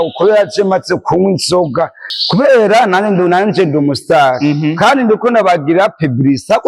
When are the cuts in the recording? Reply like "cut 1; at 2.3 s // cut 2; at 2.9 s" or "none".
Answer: cut 1; at 2.1 s